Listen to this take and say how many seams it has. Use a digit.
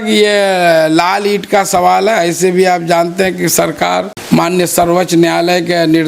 1